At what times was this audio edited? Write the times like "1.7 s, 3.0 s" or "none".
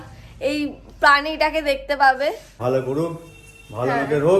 2.6 s